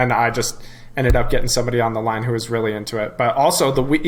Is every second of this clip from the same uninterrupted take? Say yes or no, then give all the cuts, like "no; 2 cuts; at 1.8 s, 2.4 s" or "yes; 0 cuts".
yes; 0 cuts